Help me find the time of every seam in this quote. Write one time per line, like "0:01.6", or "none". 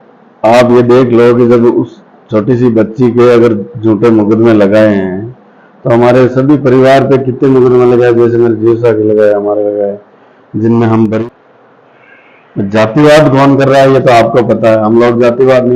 0:11.2